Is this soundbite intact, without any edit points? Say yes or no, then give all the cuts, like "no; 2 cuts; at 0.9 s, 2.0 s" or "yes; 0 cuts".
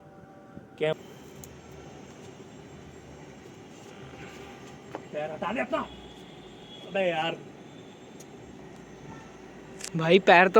no; 1 cut; at 1.0 s